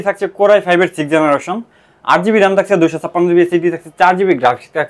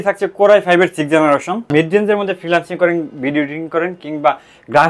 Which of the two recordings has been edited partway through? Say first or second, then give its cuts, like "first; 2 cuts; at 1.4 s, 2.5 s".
second; 1 cut; at 1.7 s